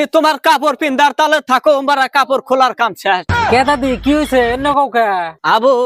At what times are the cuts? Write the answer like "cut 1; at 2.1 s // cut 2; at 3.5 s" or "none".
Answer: none